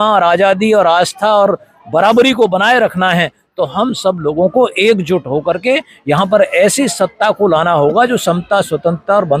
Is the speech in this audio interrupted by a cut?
no; 0 cuts

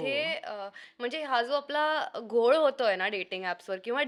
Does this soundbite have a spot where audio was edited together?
no; 0 cuts

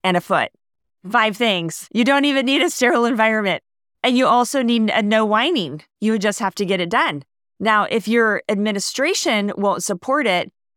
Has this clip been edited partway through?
yes; 1 cut; at 1.7 s

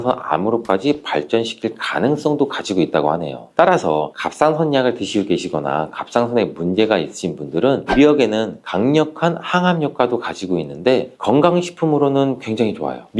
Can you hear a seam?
yes; 1 cut; at 7.8 s

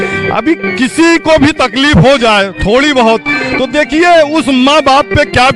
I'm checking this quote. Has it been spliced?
no; 0 cuts

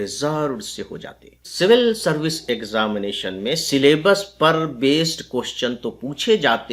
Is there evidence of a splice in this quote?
yes; 1 cut; at 1.5 s

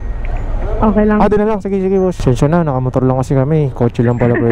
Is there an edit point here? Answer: yes; 1 cut; at 2.2 s

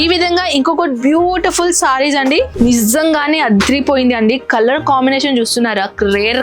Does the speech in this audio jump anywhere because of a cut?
yes; 1 cut; at 2.5 s

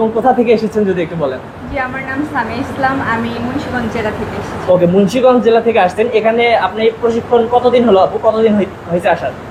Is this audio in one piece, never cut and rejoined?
yes; 0 cuts

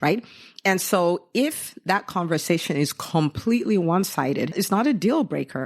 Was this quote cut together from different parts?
yes; 1 cut; at 4.5 s

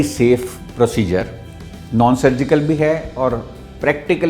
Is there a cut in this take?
no; 0 cuts

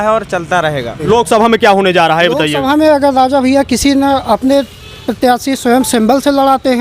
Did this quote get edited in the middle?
yes; 1 cut; at 1.0 s

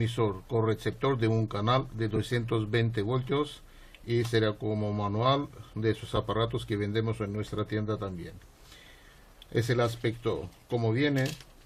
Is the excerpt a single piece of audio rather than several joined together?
yes; 0 cuts

